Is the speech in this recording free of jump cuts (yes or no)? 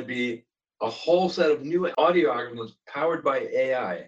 no